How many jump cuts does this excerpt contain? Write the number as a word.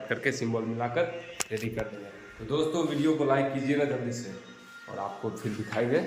zero